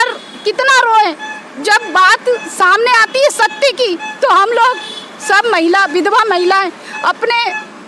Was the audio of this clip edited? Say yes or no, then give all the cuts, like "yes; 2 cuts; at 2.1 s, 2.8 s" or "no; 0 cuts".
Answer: no; 0 cuts